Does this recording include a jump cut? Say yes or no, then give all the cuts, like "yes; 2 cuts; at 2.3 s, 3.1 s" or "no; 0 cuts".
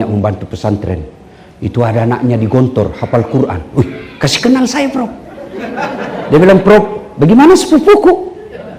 no; 0 cuts